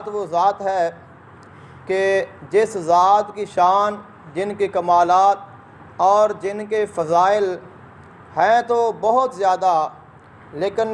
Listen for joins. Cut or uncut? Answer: uncut